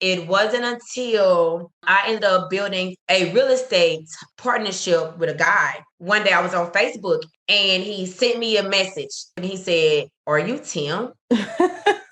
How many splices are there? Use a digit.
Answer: 1